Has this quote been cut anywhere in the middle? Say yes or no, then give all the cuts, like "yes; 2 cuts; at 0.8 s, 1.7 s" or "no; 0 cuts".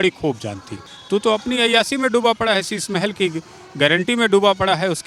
yes; 1 cut; at 1.0 s